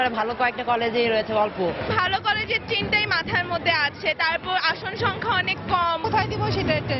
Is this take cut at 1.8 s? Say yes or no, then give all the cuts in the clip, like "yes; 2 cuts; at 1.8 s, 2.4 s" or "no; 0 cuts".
yes; 2 cuts; at 1.8 s, 6.0 s